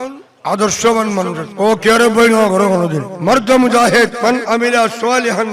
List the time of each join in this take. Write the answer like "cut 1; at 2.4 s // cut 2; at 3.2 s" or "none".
cut 1; at 1.4 s // cut 2; at 3.1 s // cut 3; at 4.1 s